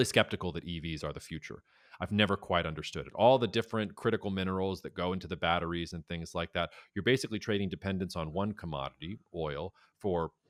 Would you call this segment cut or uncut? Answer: uncut